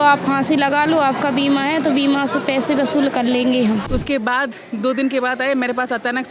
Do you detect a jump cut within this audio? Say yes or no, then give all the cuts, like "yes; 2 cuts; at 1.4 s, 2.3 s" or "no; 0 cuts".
yes; 1 cut; at 3.9 s